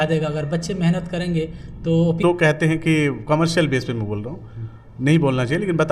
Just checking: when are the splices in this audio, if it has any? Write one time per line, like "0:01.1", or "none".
0:02.2